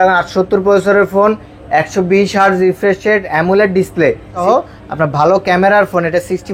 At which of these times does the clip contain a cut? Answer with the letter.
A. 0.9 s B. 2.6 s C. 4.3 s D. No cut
C